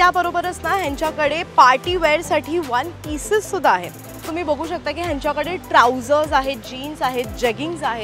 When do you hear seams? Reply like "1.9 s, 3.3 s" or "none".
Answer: 4.2 s